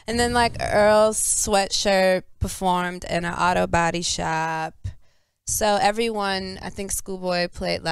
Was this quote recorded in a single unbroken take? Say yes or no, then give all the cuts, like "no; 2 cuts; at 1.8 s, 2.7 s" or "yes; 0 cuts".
no; 1 cut; at 3.2 s